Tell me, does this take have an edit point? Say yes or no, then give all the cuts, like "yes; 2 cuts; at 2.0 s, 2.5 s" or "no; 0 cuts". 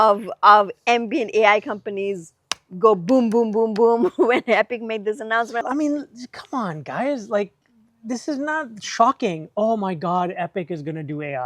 yes; 1 cut; at 5.6 s